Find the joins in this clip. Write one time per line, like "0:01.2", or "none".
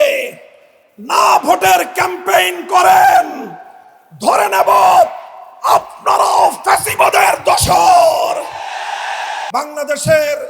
0:09.4